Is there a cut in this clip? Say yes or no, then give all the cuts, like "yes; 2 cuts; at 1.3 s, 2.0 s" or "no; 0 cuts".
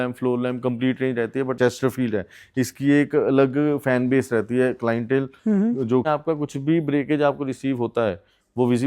yes; 2 cuts; at 1.6 s, 6.0 s